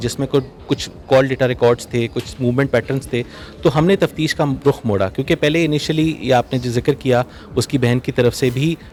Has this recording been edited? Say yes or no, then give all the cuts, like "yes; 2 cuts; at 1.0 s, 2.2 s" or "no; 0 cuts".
no; 0 cuts